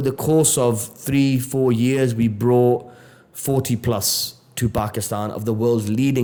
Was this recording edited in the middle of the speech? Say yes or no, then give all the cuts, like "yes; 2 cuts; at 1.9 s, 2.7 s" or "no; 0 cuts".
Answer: no; 0 cuts